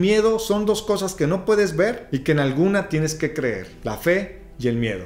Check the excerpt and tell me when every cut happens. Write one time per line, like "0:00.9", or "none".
none